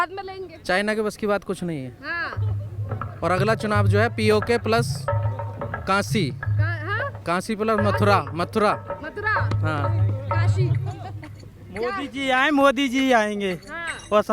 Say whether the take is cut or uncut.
uncut